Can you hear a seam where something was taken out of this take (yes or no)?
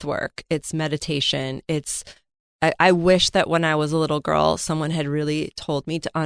no